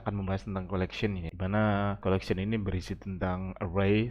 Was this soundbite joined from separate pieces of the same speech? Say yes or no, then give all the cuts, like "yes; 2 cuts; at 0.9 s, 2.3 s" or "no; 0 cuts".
yes; 2 cuts; at 1.3 s, 2.0 s